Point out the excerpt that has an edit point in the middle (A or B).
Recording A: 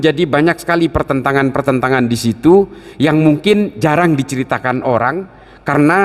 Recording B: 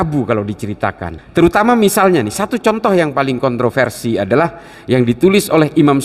B